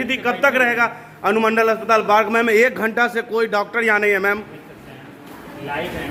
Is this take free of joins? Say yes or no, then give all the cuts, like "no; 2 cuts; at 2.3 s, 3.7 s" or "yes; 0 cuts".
yes; 0 cuts